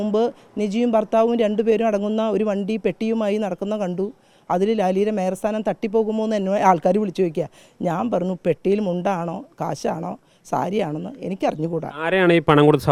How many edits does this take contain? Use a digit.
0